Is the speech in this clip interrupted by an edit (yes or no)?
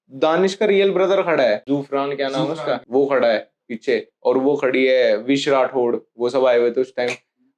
yes